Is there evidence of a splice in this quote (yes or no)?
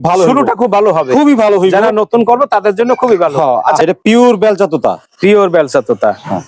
yes